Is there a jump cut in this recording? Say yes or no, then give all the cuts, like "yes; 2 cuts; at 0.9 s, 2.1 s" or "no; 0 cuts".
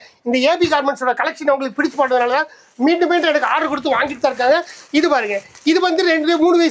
no; 0 cuts